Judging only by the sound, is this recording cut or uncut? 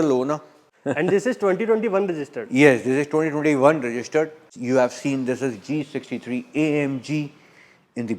cut